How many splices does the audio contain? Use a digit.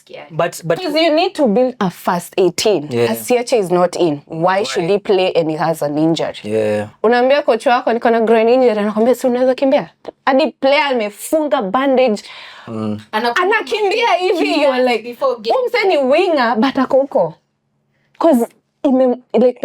1